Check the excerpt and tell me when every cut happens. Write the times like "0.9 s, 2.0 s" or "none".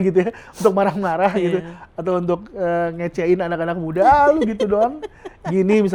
none